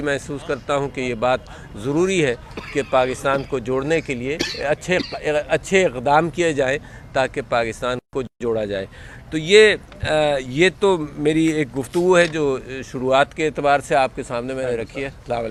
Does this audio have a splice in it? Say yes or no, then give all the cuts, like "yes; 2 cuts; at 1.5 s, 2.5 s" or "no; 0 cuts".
no; 0 cuts